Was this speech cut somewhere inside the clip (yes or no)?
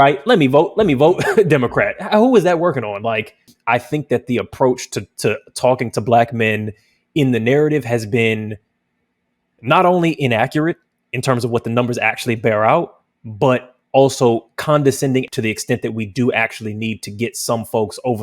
yes